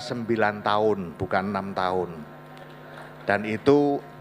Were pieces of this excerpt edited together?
yes; 1 cut; at 1.1 s

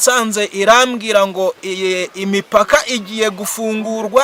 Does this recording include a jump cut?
no; 0 cuts

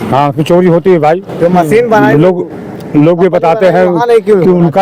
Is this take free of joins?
yes; 0 cuts

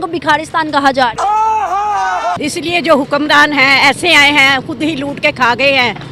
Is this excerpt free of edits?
yes; 0 cuts

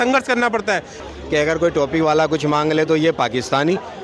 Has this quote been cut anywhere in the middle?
yes; 1 cut; at 1.0 s

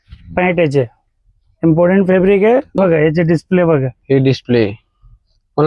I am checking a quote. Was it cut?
yes; 1 cut; at 2.8 s

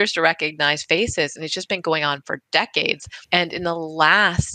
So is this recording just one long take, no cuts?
yes; 0 cuts

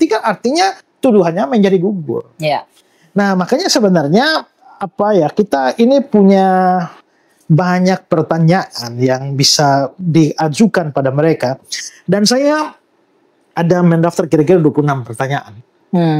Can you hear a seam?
no; 0 cuts

